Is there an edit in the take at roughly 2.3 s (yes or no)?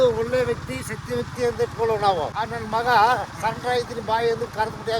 yes